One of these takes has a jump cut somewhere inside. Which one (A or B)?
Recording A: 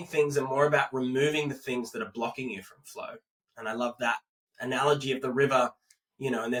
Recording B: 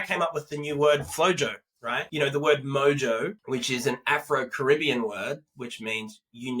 B